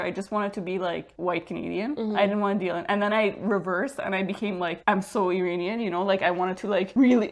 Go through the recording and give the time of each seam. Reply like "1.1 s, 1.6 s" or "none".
none